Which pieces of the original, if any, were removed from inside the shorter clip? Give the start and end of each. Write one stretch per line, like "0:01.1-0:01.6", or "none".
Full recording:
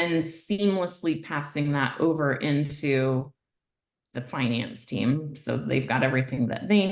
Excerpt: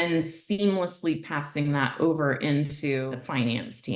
0:03.1-0:04.1